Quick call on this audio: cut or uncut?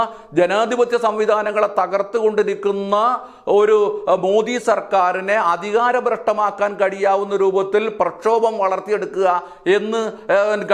uncut